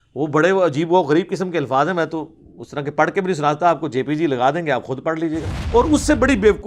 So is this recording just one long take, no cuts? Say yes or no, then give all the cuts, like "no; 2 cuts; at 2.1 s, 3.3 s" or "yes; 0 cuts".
no; 1 cut; at 5.5 s